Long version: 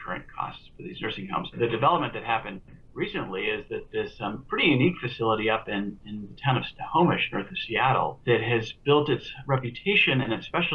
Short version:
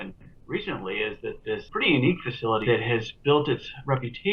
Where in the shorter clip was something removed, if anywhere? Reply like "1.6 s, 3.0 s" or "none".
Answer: 1.7 s, 2.6 s